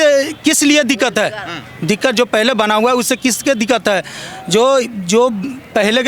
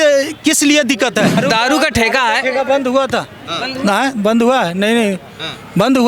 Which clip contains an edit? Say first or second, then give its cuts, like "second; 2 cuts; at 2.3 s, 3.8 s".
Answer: second; 1 cut; at 1.4 s